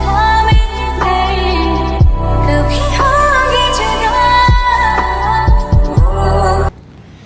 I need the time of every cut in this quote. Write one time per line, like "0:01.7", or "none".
none

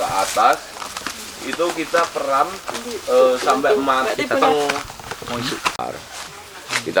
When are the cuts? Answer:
0:05.8

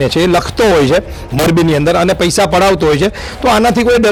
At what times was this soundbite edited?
none

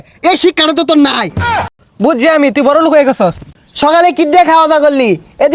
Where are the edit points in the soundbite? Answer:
0:01.7
0:03.5

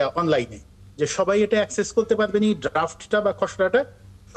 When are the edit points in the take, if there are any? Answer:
none

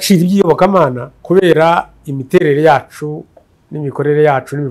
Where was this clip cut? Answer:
0:01.1

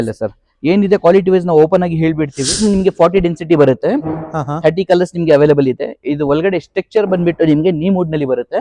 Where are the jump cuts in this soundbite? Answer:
0:02.6

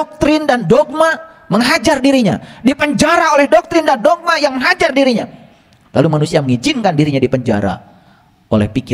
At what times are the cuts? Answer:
none

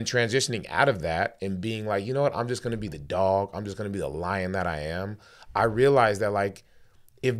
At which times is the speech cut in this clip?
none

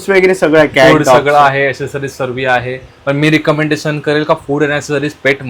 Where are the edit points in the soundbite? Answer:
none

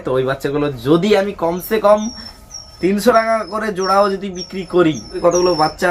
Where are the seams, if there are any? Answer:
none

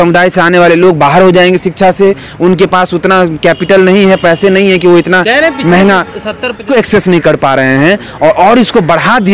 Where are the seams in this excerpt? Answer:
0:06.6

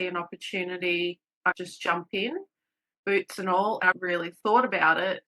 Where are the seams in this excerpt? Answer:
0:03.8

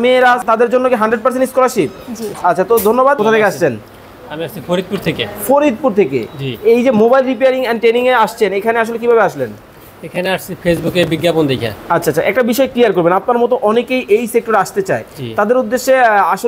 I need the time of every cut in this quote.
0:03.2

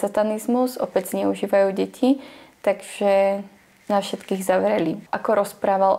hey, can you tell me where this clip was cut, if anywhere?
0:05.0

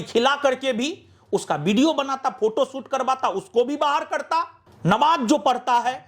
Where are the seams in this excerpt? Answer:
0:04.6

